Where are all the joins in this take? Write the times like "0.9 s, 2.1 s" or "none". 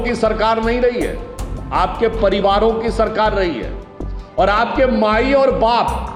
none